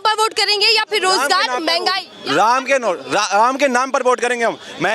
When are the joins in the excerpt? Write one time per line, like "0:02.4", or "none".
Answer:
none